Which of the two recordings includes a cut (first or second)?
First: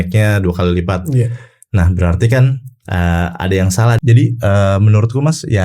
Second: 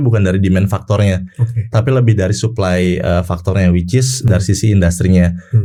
first